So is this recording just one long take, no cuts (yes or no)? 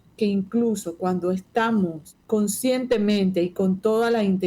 no